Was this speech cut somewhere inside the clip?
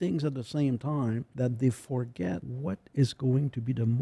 yes; 2 cuts; at 1.3 s, 2.5 s

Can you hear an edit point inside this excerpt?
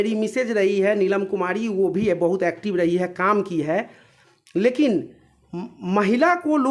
no; 0 cuts

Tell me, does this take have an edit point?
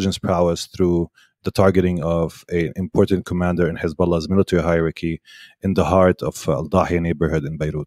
no; 0 cuts

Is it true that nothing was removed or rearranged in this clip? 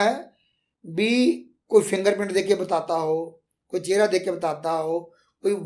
yes; 0 cuts

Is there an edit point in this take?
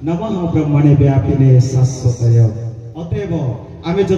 yes; 1 cut; at 2.9 s

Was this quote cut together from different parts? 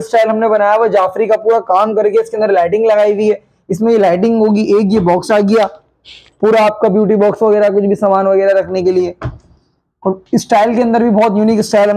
no; 0 cuts

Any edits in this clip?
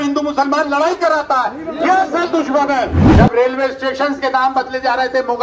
yes; 1 cut; at 3.0 s

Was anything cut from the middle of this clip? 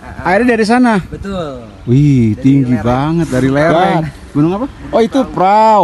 yes; 1 cut; at 4.8 s

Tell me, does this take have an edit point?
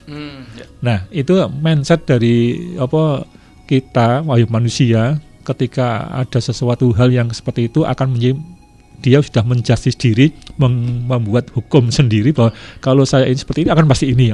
no; 0 cuts

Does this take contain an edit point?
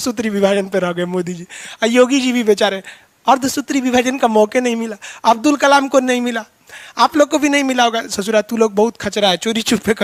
no; 0 cuts

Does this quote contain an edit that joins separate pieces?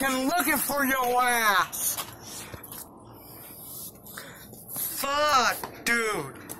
no; 0 cuts

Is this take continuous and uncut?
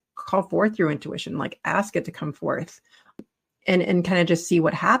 no; 1 cut; at 3.2 s

